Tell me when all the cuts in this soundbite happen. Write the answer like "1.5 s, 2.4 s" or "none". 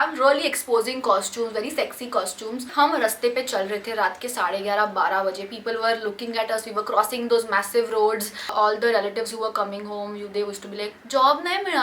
2.7 s, 8.5 s